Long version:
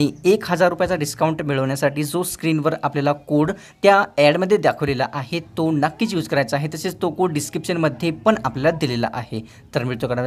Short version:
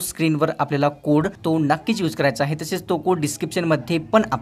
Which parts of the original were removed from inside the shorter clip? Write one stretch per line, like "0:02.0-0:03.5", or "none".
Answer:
0:03.6-0:05.5